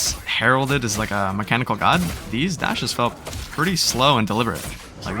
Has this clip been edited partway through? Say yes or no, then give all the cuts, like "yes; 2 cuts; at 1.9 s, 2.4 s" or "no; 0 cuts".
no; 0 cuts